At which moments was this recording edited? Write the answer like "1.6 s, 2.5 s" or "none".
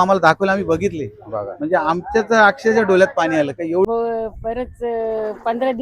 3.9 s